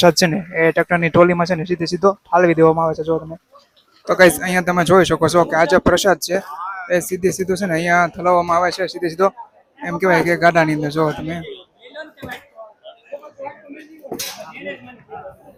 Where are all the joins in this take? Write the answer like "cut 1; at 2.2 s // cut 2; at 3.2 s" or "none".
none